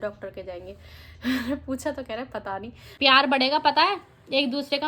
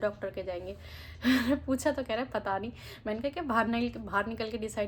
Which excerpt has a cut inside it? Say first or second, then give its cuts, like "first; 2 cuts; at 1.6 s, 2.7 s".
first; 1 cut; at 2.8 s